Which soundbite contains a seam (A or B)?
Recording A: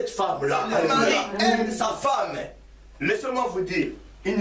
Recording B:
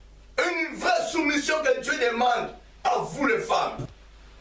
A